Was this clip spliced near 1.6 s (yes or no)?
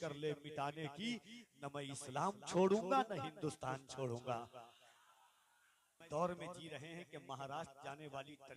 no